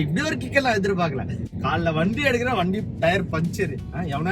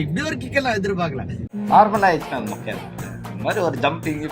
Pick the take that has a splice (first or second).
second